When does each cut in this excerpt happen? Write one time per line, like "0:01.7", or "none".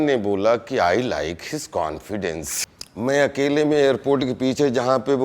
0:02.6